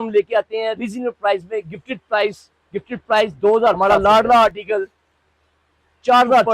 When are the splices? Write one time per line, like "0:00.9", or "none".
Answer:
0:03.8